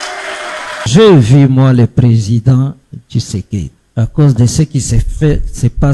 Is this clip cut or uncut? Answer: cut